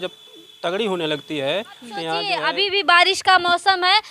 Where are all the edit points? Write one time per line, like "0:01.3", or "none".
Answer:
0:02.2